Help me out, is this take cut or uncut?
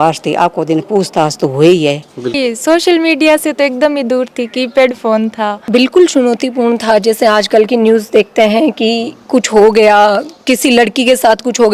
cut